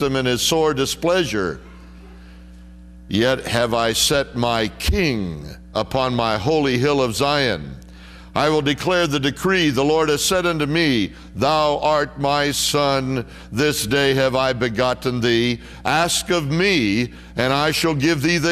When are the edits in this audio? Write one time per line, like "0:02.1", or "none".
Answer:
0:09.2